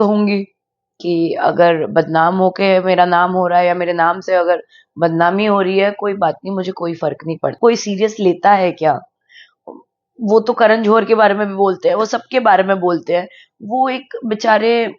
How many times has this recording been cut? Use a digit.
1